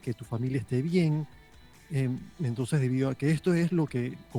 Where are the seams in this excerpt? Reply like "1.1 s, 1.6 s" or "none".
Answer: none